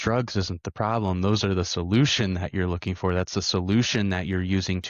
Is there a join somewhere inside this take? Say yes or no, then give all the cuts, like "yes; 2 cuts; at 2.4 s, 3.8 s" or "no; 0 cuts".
no; 0 cuts